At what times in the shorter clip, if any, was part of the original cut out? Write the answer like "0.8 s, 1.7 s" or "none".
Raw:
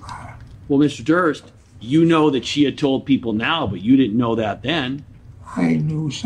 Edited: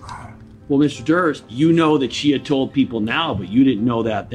1.5 s